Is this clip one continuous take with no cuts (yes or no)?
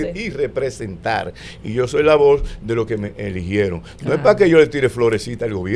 yes